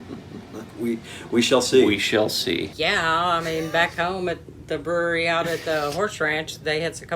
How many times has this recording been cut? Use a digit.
1